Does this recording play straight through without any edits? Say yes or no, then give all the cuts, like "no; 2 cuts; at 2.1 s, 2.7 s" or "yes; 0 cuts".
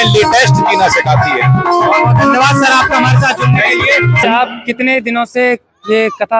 yes; 0 cuts